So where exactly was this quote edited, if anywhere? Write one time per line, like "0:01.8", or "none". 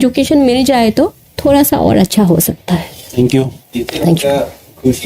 none